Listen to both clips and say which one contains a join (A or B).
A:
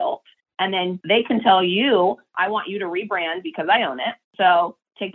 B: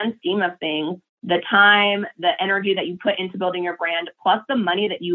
A